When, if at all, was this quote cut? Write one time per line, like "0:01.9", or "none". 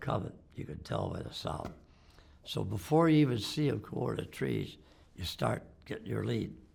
none